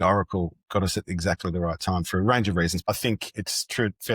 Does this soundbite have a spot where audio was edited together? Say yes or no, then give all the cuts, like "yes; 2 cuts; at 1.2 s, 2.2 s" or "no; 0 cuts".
yes; 1 cut; at 2.8 s